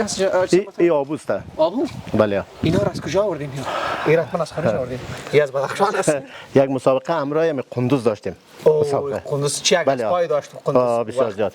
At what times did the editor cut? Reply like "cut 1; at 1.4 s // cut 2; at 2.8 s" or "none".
cut 1; at 6.3 s